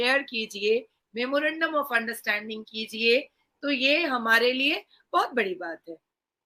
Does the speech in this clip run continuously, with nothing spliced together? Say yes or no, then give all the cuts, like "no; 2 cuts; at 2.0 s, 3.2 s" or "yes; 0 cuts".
yes; 0 cuts